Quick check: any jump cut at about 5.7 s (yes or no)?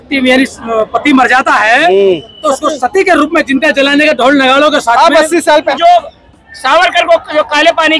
yes